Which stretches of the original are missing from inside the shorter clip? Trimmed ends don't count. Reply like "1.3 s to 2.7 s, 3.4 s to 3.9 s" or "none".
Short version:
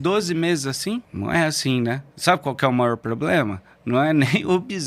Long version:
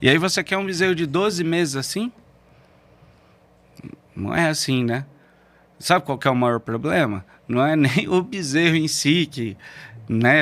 2.2 s to 4.1 s, 5.1 s to 5.7 s